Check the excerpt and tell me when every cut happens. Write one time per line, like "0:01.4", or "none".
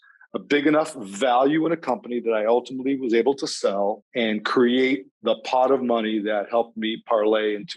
0:04.0

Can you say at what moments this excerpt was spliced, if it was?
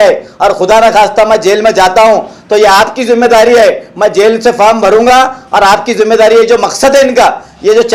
none

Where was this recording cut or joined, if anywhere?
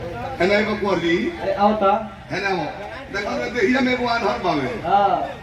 none

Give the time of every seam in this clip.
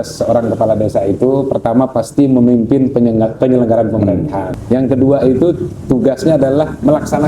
0:04.5

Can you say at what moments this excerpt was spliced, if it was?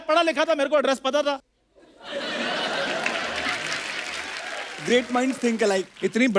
0:01.4

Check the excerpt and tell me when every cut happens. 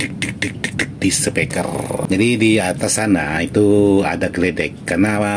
0:02.0

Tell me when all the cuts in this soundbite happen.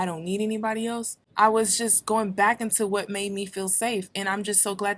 0:01.2

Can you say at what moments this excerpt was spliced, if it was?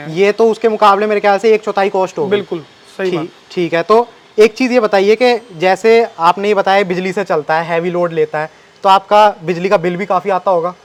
none

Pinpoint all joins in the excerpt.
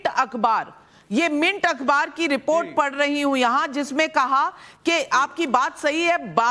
0:03.9

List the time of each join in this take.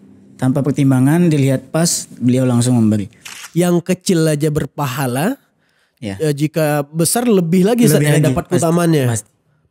0:03.4

